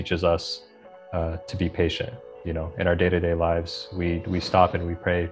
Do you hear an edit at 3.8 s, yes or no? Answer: no